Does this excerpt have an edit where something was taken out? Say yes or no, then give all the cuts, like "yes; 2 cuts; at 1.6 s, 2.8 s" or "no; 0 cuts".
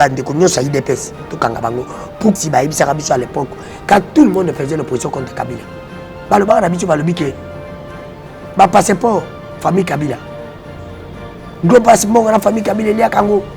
yes; 1 cut; at 2.4 s